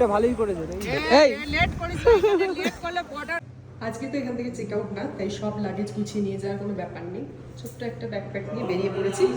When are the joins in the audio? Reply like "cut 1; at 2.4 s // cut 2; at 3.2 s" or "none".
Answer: cut 1; at 3.4 s